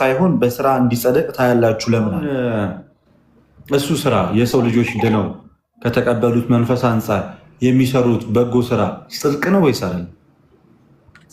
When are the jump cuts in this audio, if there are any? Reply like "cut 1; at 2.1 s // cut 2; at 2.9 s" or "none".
cut 1; at 2.2 s